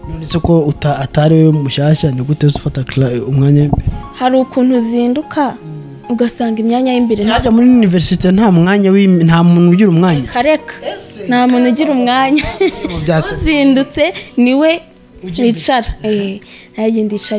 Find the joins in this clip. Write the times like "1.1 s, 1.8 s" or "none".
none